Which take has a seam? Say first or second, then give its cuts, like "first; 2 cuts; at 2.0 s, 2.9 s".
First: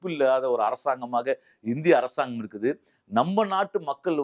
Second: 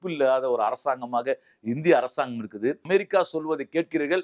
second; 1 cut; at 2.9 s